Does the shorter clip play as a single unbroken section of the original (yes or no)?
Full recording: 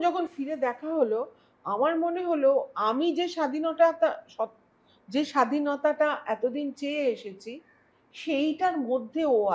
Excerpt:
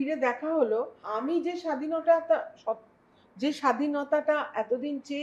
no